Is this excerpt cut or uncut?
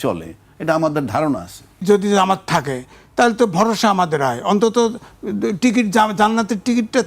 cut